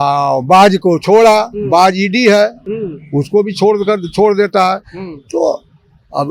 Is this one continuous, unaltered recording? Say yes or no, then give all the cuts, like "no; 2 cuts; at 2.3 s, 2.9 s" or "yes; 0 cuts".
yes; 0 cuts